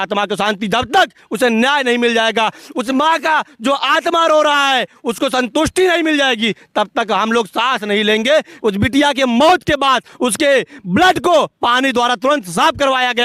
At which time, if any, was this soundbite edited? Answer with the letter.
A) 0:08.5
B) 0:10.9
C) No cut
A